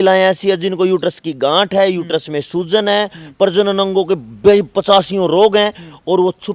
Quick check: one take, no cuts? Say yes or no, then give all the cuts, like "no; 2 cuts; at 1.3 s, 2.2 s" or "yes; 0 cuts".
yes; 0 cuts